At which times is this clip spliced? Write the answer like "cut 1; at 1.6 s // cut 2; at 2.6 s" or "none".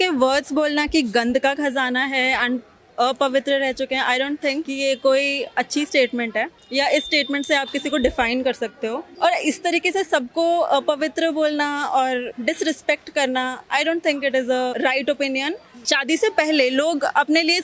cut 1; at 4.7 s // cut 2; at 6.6 s // cut 3; at 9.0 s // cut 4; at 12.3 s // cut 5; at 14.7 s // cut 6; at 15.7 s